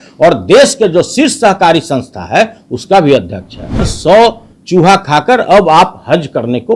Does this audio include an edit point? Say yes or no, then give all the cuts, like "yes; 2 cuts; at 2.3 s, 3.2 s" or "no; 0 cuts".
yes; 1 cut; at 3.9 s